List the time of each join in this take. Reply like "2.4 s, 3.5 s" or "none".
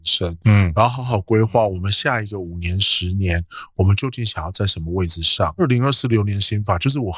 5.6 s